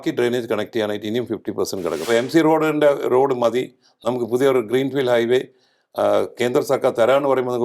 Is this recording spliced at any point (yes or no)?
yes